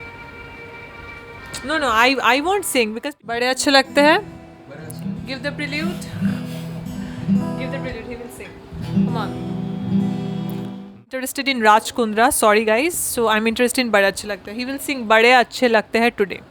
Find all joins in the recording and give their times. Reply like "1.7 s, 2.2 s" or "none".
2.9 s, 11.2 s

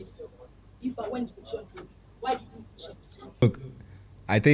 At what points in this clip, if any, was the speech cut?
3.4 s

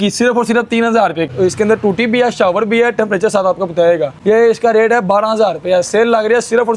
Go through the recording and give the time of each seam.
1.3 s, 4.1 s

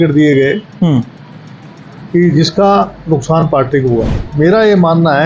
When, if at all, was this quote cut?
4.1 s

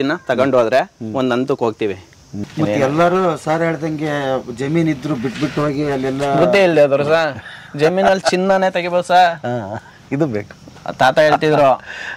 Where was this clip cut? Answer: 2.3 s

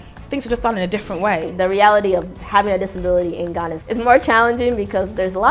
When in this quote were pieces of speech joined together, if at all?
1.5 s, 3.8 s

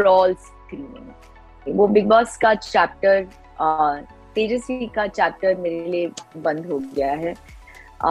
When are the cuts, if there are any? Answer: 1.6 s

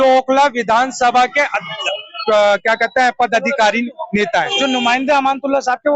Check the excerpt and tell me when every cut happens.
4.5 s

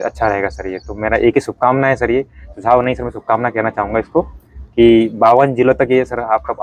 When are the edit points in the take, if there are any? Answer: none

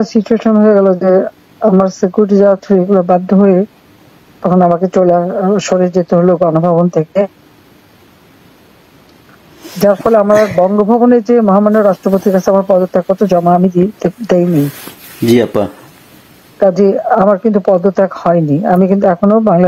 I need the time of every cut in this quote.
none

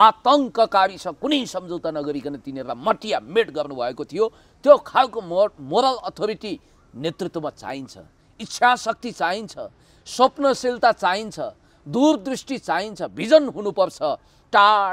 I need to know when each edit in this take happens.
none

